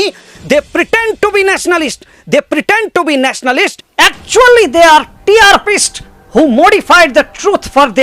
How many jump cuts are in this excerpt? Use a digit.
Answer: 0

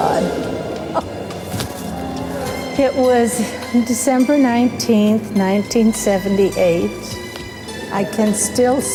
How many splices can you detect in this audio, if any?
0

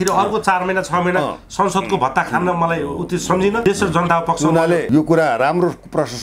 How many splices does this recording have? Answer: 2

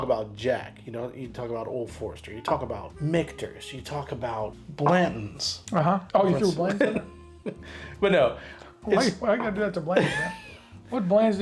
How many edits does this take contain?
3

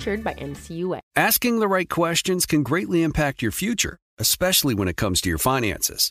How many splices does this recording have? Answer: 1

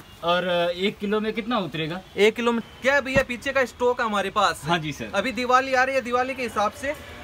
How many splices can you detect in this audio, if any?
1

